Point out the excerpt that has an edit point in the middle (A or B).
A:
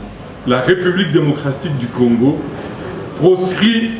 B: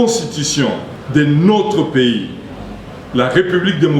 B